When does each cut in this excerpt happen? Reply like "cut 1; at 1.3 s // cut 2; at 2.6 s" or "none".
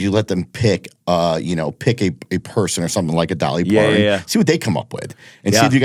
none